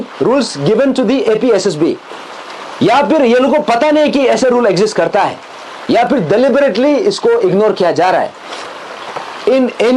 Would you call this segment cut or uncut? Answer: uncut